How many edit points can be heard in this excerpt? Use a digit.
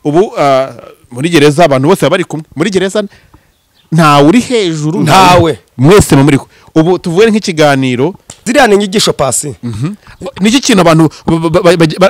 1